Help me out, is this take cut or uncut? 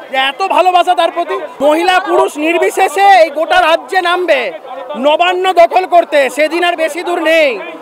cut